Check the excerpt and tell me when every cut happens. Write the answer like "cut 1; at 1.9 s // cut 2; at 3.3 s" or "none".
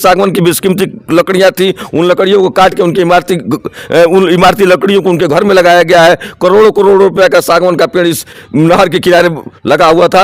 none